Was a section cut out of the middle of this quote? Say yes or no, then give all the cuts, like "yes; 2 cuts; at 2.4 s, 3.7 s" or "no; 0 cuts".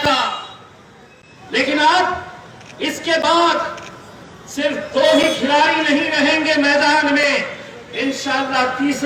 no; 0 cuts